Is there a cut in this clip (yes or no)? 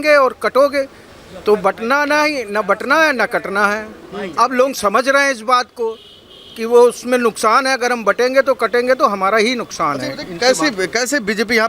no